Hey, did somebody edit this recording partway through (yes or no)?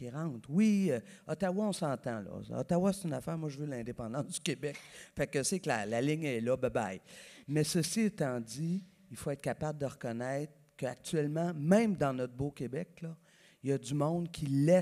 no